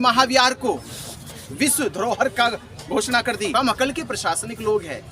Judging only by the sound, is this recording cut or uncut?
cut